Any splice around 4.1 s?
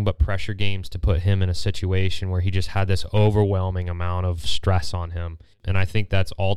no; 1 cut; at 5.6 s

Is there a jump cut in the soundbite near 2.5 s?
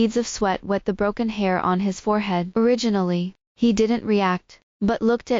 yes; 1 cut; at 2.5 s

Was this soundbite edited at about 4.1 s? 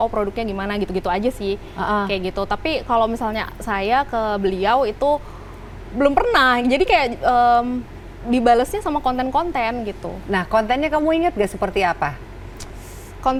no; 0 cuts

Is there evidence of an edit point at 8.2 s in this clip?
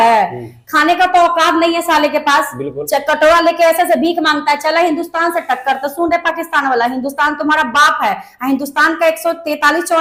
no; 0 cuts

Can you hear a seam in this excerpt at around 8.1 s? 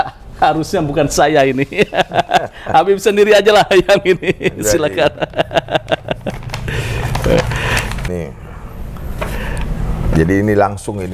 yes; 1 cut; at 8.1 s

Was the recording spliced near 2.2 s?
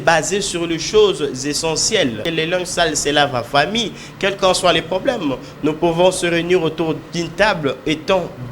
yes; 1 cut; at 2.2 s

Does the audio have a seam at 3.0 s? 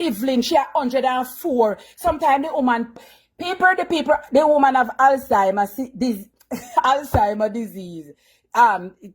yes; 1 cut; at 3.0 s

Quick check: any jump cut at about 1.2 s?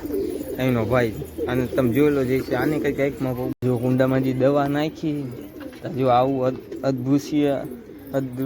no; 1 cut; at 3.5 s

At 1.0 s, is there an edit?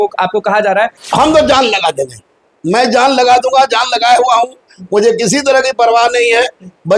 yes; 1 cut; at 1.0 s

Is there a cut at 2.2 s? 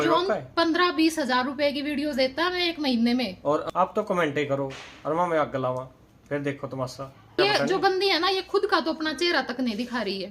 no; 2 cuts; at 3.7 s, 7.4 s

